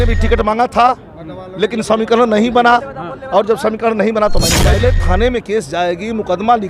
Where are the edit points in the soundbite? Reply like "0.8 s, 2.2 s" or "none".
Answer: 4.6 s